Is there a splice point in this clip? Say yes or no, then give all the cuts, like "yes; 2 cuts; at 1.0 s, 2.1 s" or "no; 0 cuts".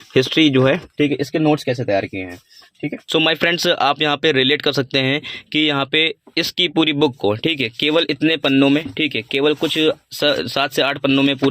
no; 0 cuts